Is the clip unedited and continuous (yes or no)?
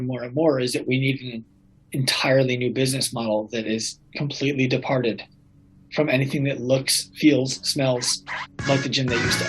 yes